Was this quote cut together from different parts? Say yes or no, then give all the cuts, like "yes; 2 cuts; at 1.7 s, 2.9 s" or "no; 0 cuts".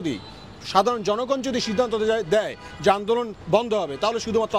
no; 0 cuts